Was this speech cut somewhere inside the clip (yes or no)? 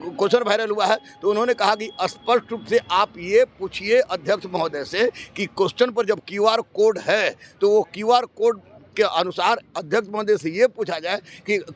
no